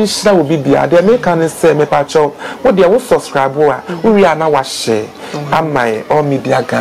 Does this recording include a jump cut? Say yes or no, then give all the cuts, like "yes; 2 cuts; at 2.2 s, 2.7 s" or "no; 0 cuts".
no; 0 cuts